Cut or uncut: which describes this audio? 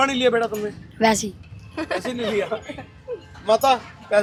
uncut